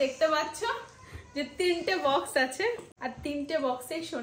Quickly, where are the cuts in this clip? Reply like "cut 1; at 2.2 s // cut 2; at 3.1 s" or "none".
cut 1; at 2.9 s